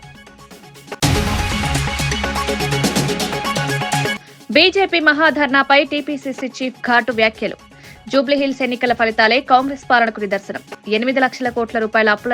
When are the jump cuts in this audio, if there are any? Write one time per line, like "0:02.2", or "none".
0:01.0
0:04.1